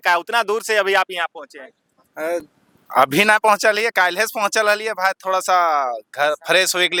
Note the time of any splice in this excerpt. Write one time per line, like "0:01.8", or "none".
none